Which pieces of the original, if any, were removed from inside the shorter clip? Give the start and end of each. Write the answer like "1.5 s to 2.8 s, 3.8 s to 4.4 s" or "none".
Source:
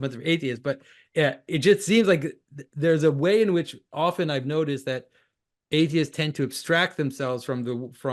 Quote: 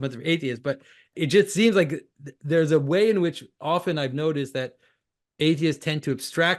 1.1 s to 1.4 s